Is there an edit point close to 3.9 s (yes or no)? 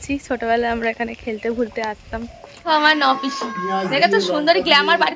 no